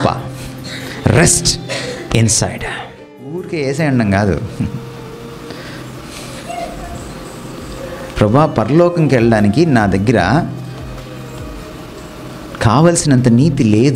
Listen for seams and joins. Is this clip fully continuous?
no; 1 cut; at 3.4 s

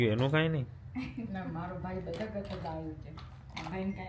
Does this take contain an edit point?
no; 0 cuts

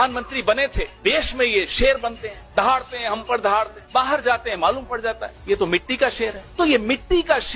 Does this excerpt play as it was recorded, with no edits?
yes; 0 cuts

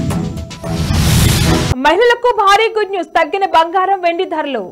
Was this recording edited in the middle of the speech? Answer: no; 0 cuts

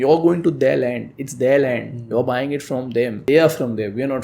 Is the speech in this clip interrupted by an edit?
yes; 1 cut; at 3.3 s

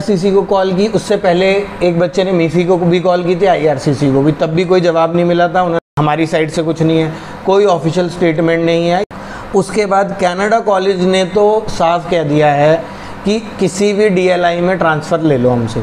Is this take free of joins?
no; 2 cuts; at 5.8 s, 9.1 s

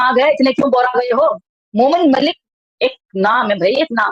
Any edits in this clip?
no; 0 cuts

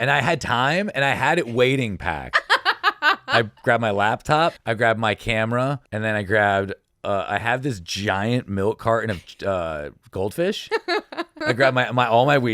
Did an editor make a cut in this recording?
yes; 3 cuts; at 4.6 s, 5.8 s, 11.3 s

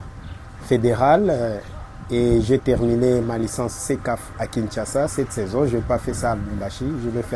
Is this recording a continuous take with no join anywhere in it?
yes; 0 cuts

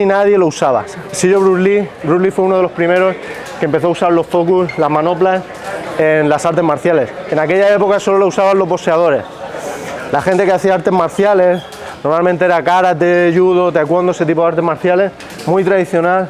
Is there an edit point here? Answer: no; 0 cuts

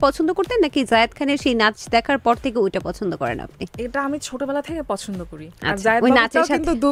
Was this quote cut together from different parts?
no; 0 cuts

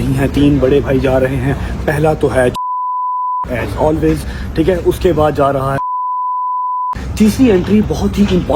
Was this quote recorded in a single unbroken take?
yes; 0 cuts

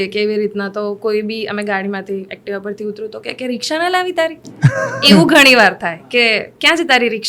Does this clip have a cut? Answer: no; 0 cuts

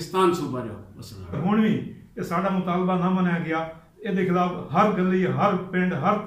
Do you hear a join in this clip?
yes; 1 cut; at 1.4 s

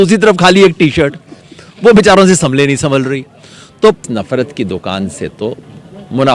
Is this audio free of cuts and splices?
no; 1 cut; at 4.0 s

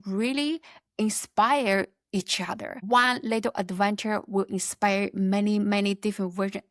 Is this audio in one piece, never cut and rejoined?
no; 1 cut; at 2.7 s

